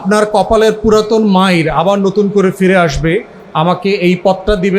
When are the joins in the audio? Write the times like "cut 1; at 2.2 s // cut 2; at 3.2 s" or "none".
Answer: cut 1; at 3.4 s